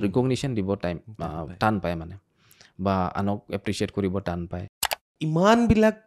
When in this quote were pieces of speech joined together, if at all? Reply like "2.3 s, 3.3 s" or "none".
5.1 s